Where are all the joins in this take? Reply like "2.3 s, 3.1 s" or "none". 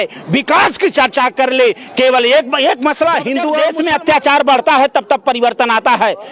3.6 s